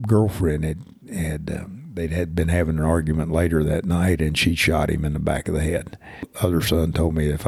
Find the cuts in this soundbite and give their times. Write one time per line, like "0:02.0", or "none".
0:06.3